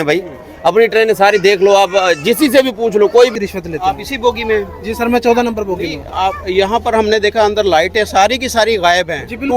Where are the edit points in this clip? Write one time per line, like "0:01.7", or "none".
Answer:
0:03.3